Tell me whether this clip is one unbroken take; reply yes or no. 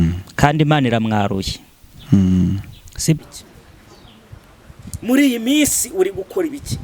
no